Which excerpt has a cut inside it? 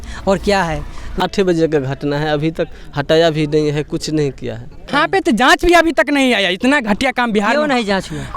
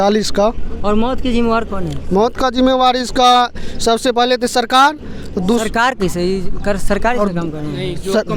first; 2 cuts; at 1.2 s, 4.9 s

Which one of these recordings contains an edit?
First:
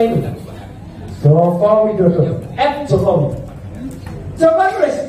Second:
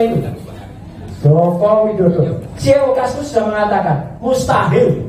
second; 1 cut; at 2.4 s

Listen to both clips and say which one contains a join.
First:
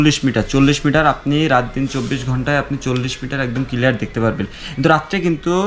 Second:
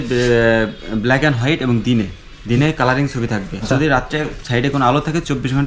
second; 1 cut; at 3.6 s

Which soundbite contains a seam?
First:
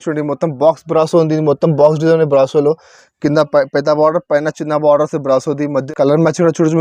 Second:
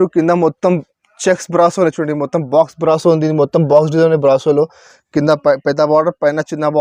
first; 1 cut; at 5.8 s

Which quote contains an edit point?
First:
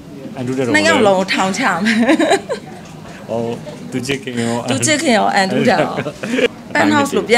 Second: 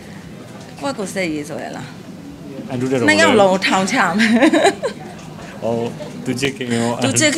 first; 1 cut; at 6.5 s

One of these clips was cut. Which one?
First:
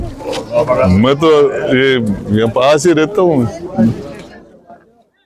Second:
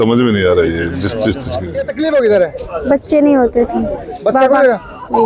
second; 1 cut; at 2.1 s

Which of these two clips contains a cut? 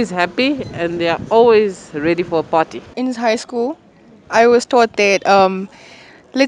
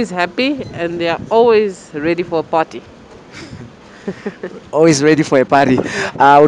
first; 1 cut; at 3.0 s

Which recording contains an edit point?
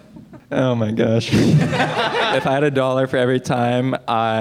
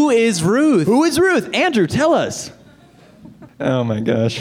first; 1 cut; at 2.3 s

